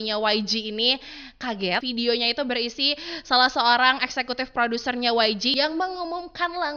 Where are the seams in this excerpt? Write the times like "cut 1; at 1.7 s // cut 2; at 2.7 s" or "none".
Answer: cut 1; at 1.8 s // cut 2; at 5.5 s